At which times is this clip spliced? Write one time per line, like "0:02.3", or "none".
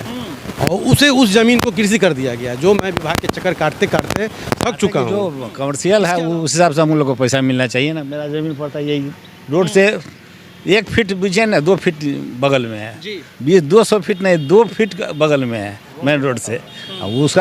0:05.4